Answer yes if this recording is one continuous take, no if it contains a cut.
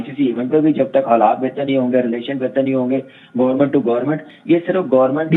yes